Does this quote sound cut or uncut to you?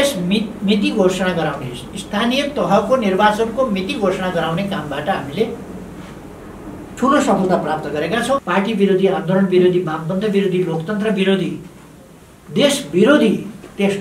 cut